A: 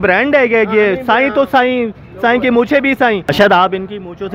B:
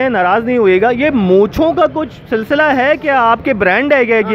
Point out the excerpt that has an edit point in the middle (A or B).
A